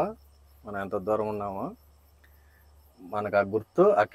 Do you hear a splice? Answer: no; 0 cuts

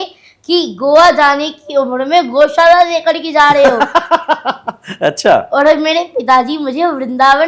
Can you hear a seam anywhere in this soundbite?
no; 0 cuts

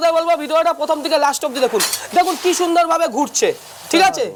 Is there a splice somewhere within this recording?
no; 0 cuts

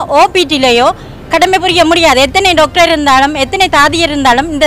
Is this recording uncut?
yes; 0 cuts

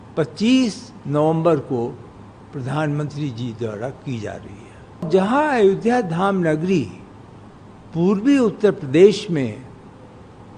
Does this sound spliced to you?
yes; 1 cut; at 5.1 s

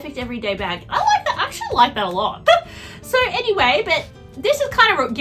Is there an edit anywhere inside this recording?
yes; 1 cut; at 2.4 s

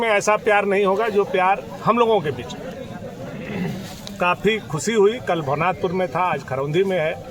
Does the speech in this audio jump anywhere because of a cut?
no; 0 cuts

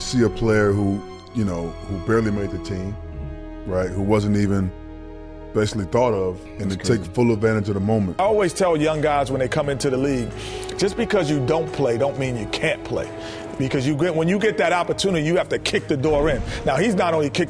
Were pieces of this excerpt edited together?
yes; 2 cuts; at 6.5 s, 8.2 s

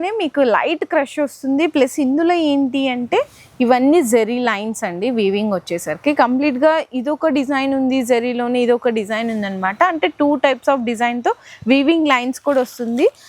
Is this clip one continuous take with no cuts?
yes; 0 cuts

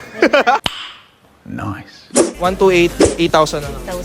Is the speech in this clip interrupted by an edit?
yes; 1 cut; at 2.2 s

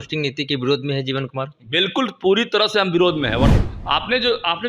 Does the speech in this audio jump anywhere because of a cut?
yes; 1 cut; at 3.6 s

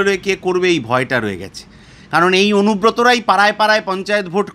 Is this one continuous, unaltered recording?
yes; 0 cuts

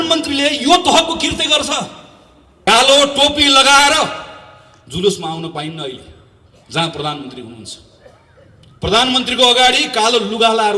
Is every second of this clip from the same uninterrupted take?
no; 1 cut; at 2.7 s

